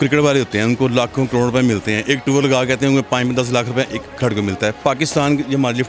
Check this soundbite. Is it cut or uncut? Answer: uncut